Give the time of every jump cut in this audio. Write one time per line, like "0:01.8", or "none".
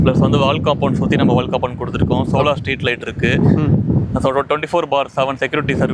none